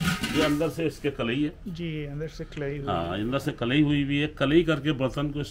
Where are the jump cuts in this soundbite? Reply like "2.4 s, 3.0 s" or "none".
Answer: none